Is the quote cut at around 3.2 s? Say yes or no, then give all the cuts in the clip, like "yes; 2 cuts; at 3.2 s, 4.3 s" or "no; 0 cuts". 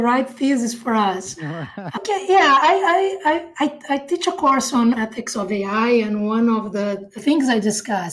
no; 3 cuts; at 2.0 s, 5.0 s, 7.2 s